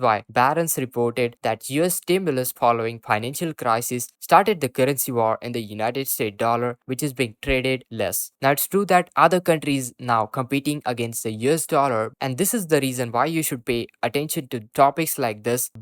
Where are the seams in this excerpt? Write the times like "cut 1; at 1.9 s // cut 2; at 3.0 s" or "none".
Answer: cut 1; at 12.1 s

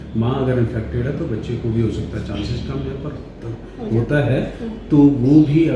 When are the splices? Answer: none

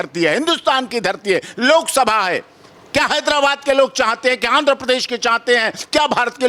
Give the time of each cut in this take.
none

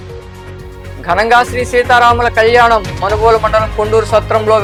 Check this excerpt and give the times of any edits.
none

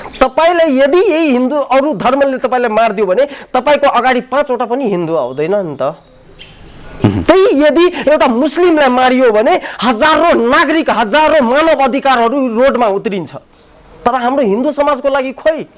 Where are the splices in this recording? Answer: none

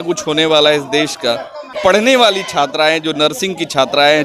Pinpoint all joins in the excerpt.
cut 1; at 1.7 s

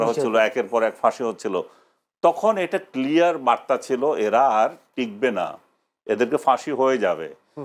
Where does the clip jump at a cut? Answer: none

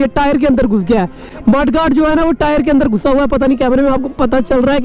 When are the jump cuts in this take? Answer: none

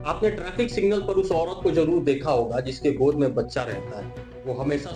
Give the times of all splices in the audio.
none

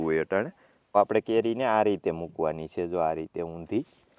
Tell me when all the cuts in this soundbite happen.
cut 1; at 1.0 s

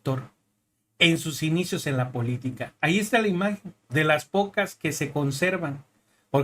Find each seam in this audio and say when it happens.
cut 1; at 2.7 s

